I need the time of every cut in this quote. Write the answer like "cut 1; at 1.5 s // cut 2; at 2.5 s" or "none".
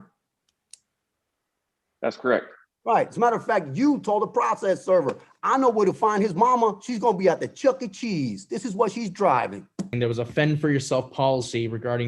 cut 1; at 9.9 s

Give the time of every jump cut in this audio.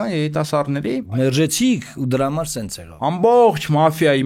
cut 1; at 1.2 s // cut 2; at 2.8 s

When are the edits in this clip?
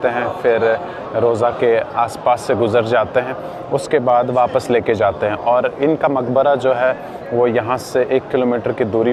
none

